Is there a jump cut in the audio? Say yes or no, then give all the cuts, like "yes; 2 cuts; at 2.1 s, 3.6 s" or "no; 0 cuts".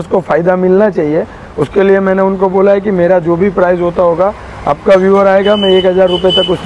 no; 0 cuts